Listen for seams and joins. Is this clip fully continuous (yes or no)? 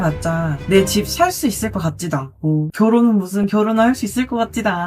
no